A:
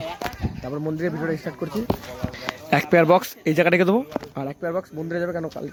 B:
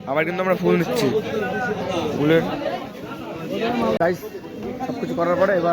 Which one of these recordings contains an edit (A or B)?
B